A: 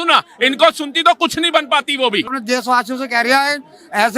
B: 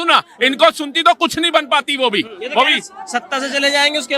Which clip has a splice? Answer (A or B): A